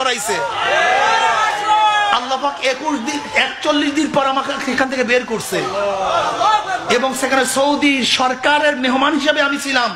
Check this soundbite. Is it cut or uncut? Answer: uncut